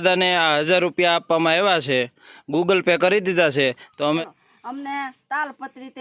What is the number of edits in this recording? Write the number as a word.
one